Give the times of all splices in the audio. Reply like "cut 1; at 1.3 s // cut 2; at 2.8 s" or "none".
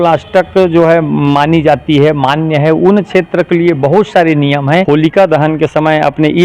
cut 1; at 4.8 s